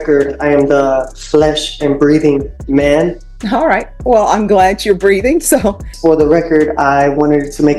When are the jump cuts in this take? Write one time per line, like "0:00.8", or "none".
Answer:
0:03.3
0:05.9